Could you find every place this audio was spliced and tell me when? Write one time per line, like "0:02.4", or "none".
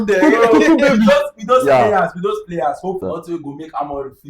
0:03.0